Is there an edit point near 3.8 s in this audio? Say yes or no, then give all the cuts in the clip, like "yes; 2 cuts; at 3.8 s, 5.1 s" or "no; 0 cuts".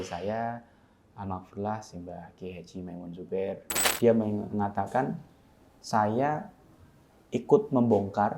yes; 1 cut; at 3.8 s